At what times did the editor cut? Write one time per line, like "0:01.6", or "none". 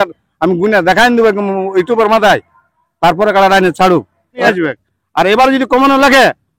0:04.4

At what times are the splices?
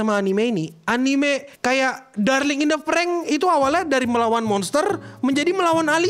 0:01.5

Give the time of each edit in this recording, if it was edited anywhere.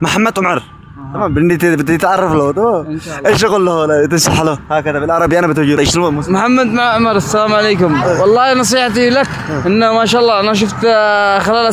0:05.8

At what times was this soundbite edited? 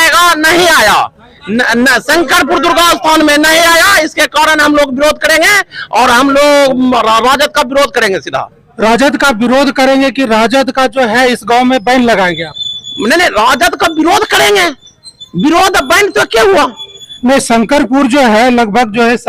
none

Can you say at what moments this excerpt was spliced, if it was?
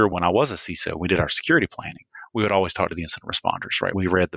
none

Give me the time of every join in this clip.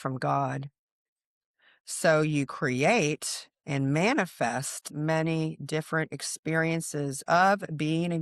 0:04.9

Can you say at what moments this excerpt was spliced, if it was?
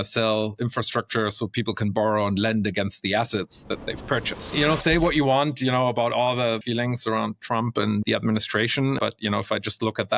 0:04.5
0:06.6
0:08.0
0:09.0

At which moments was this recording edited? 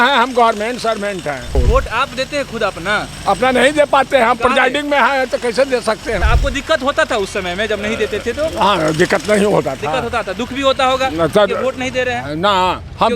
0:01.6
0:06.2

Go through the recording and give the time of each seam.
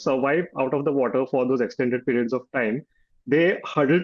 none

